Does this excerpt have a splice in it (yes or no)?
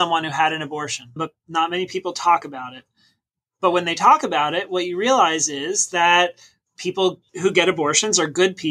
yes